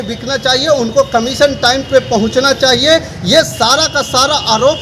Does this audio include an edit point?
no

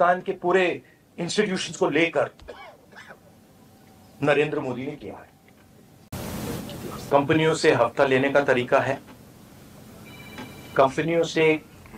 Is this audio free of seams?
no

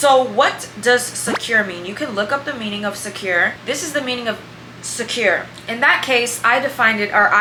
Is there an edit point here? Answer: no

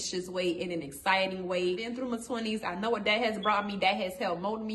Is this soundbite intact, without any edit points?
no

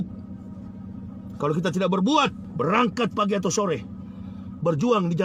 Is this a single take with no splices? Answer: no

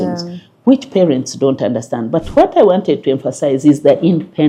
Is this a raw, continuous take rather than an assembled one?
yes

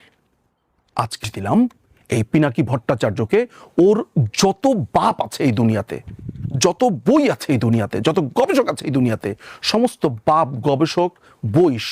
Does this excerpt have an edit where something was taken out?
yes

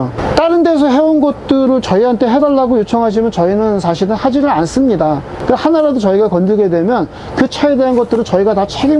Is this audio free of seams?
no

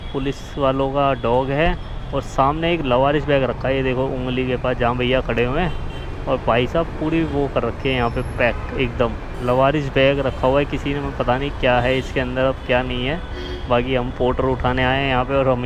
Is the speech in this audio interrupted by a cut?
no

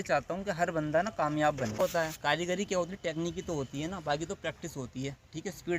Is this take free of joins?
no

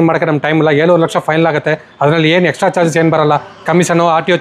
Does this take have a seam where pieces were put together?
no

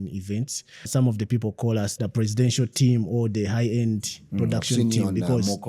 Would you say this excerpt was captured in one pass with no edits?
no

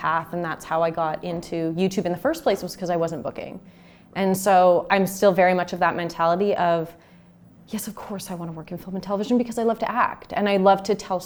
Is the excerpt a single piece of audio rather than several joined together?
yes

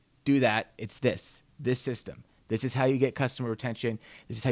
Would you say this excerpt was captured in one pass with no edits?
yes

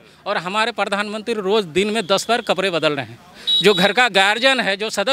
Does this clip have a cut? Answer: no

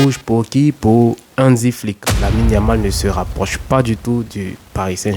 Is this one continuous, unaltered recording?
no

